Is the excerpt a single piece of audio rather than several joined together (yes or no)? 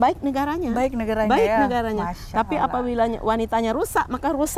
yes